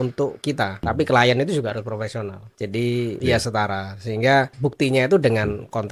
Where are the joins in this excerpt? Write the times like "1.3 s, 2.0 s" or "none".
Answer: 0.9 s, 2.4 s, 3.2 s, 4.5 s